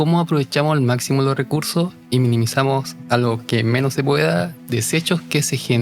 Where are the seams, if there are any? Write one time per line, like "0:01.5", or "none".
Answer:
0:04.6